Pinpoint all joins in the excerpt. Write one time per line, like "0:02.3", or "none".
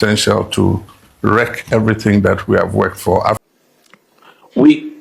0:03.4